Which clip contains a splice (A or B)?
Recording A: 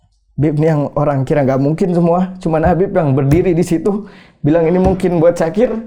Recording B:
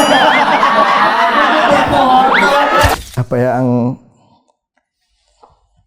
B